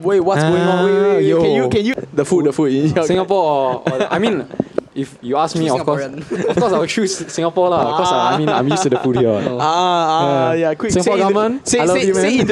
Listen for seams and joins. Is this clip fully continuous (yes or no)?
no